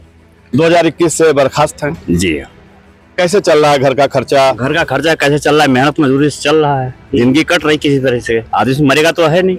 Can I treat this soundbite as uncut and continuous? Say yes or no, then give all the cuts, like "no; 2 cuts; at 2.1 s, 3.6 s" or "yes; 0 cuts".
yes; 0 cuts